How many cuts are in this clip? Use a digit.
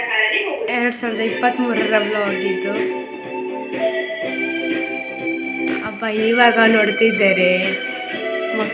0